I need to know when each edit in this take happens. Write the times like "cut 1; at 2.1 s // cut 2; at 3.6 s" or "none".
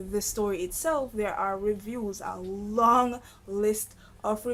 none